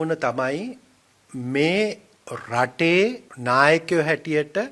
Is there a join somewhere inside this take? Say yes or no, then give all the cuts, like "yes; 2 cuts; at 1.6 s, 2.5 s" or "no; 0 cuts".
yes; 1 cut; at 3.3 s